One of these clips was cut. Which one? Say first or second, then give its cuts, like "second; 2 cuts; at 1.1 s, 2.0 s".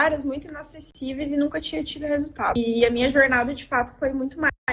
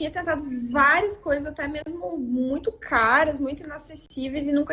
first; 1 cut; at 2.5 s